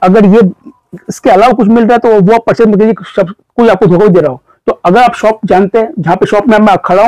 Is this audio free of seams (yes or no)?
yes